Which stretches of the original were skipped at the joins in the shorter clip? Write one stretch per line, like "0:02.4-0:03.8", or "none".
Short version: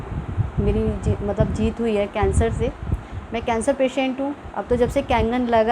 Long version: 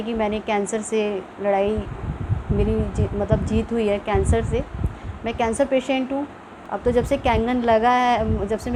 0:06.4-0:06.6